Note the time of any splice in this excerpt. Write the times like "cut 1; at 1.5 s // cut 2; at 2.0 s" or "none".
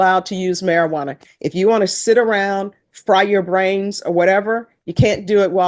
none